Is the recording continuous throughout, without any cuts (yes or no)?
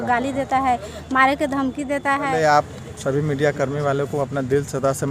yes